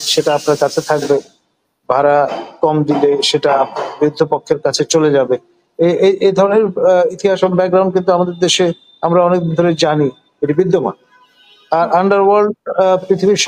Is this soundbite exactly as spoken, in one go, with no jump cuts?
yes; 0 cuts

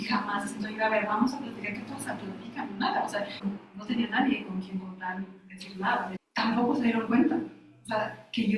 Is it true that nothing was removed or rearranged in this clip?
no; 2 cuts; at 3.3 s, 6.2 s

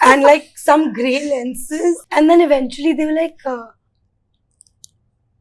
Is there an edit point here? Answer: yes; 1 cut; at 2.0 s

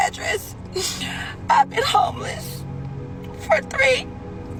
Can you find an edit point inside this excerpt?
no; 0 cuts

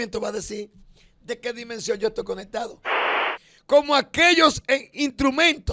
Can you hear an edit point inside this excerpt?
yes; 1 cut; at 3.0 s

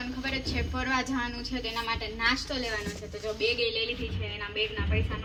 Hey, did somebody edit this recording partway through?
no; 0 cuts

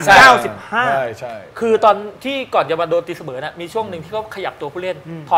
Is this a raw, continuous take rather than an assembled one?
yes; 0 cuts

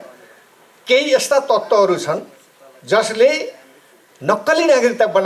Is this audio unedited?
yes; 0 cuts

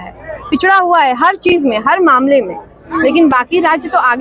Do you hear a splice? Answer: no; 0 cuts

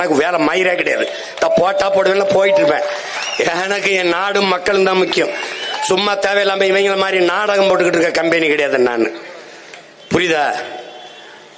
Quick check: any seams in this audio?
no; 0 cuts

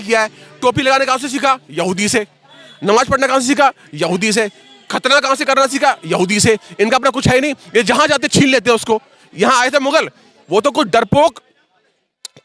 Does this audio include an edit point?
no; 0 cuts

